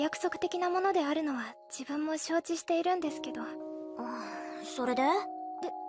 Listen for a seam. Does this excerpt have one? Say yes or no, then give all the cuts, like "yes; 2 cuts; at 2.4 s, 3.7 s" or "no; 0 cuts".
no; 0 cuts